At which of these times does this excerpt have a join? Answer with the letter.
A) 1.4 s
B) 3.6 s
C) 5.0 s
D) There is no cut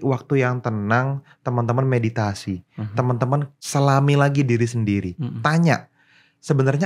B